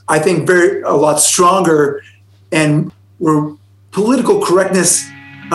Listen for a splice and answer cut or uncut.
cut